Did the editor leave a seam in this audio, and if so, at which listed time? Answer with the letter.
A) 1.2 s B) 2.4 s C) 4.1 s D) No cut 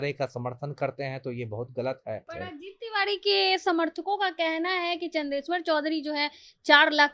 B